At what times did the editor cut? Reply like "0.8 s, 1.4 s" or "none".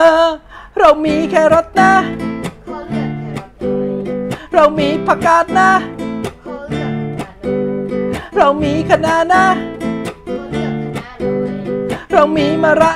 none